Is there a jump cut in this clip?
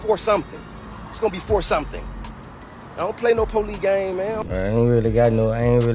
yes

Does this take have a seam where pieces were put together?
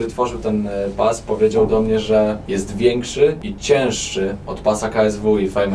yes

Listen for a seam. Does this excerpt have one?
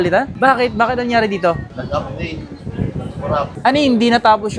no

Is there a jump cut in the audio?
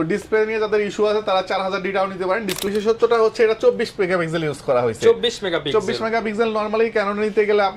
yes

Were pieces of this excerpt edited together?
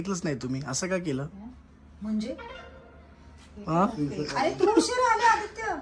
no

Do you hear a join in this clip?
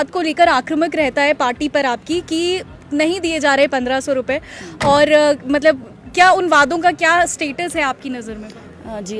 no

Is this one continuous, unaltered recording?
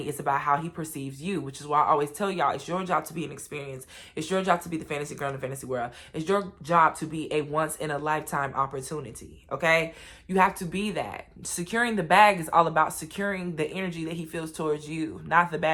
yes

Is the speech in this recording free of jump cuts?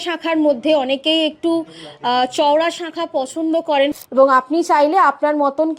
no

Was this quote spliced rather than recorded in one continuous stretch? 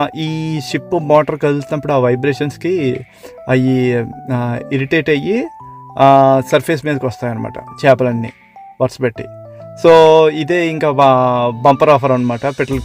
no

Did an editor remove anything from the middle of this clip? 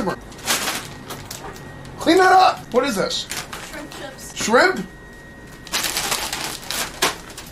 yes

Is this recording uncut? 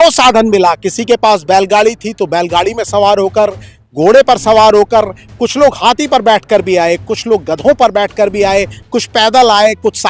yes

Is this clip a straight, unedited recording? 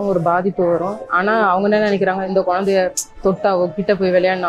no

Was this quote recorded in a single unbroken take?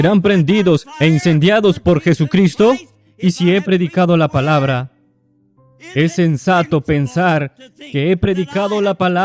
yes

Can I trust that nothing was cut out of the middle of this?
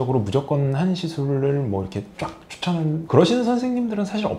yes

